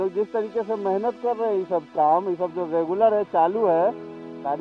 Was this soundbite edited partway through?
no; 0 cuts

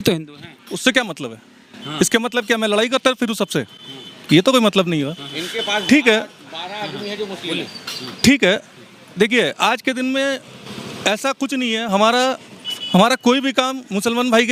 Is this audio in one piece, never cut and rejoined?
yes; 0 cuts

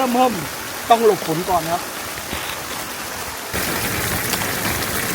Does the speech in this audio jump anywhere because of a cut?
yes; 1 cut; at 3.5 s

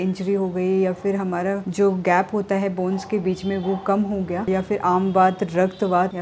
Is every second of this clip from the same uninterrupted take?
yes; 0 cuts

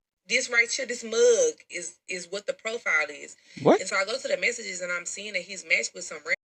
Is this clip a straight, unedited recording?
yes; 0 cuts

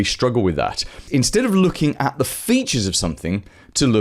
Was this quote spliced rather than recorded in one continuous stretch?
yes; 1 cut; at 1.0 s

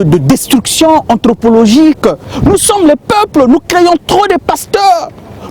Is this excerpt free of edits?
no; 1 cut; at 2.3 s

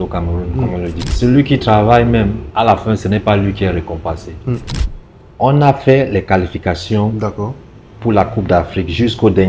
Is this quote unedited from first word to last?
no; 3 cuts; at 1.0 s, 2.4 s, 4.7 s

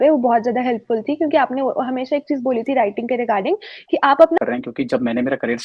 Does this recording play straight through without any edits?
no; 1 cut; at 4.4 s

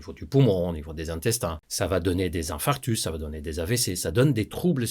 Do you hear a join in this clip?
yes; 1 cut; at 1.6 s

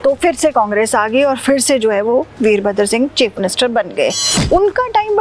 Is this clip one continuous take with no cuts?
no; 1 cut; at 4.3 s

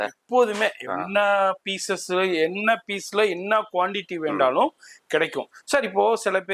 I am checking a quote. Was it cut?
no; 0 cuts

